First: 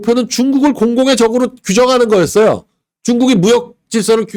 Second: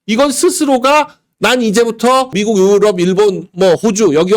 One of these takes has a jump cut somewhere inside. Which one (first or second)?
second